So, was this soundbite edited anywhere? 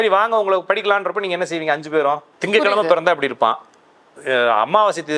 yes; 1 cut; at 2.3 s

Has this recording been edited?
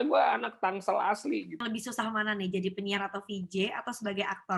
yes; 1 cut; at 1.6 s

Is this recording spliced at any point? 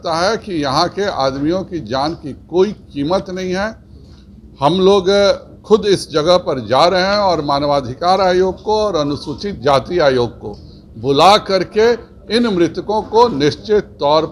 no; 0 cuts

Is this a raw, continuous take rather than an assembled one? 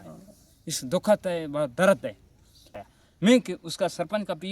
no; 1 cut; at 2.8 s

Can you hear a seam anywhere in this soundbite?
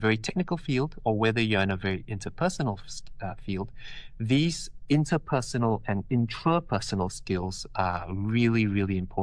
no; 0 cuts

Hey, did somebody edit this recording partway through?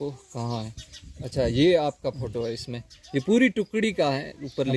no; 0 cuts

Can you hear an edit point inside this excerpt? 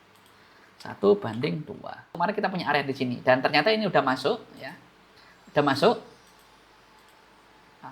yes; 1 cut; at 2.1 s

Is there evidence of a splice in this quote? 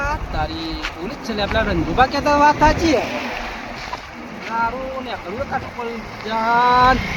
no; 0 cuts

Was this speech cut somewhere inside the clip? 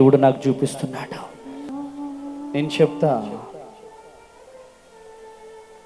yes; 1 cut; at 1.7 s

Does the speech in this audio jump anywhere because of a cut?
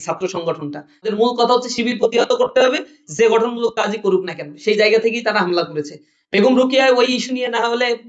yes; 1 cut; at 1.1 s

